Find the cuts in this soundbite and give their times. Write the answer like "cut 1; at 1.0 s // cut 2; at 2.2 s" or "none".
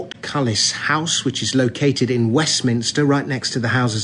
cut 1; at 1.1 s